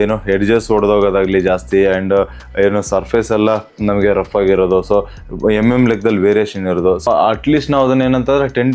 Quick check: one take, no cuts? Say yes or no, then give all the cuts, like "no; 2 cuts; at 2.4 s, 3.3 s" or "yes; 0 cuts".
no; 1 cut; at 7.1 s